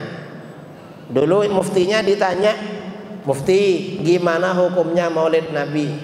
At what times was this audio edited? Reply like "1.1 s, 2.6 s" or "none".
none